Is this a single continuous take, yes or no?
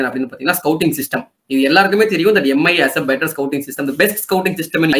yes